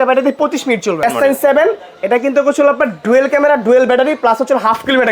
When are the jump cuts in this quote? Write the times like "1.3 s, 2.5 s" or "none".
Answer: 1.0 s

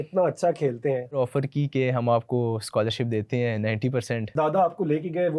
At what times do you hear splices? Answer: 1.2 s, 4.3 s

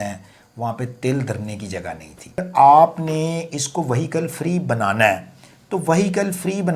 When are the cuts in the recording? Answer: 2.4 s

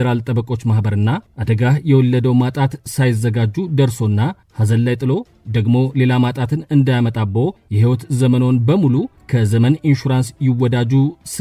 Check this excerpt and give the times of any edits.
1.3 s, 4.5 s, 7.7 s, 9.2 s

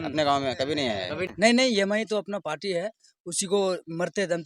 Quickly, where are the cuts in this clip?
1.3 s

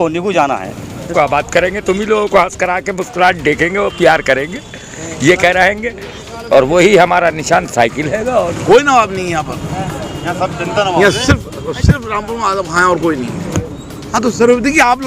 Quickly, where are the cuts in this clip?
1.1 s, 8.5 s, 13.5 s

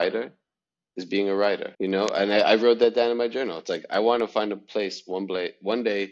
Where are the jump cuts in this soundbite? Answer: 1.7 s

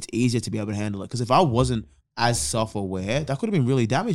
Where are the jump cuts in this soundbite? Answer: 2.0 s

